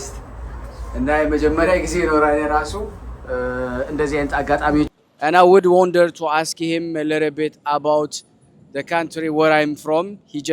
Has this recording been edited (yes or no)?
yes